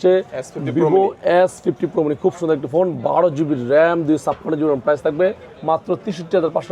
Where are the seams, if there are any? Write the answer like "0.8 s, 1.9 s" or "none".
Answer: none